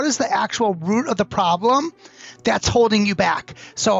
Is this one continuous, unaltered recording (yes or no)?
yes